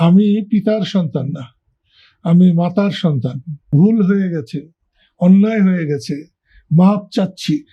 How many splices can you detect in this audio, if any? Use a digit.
1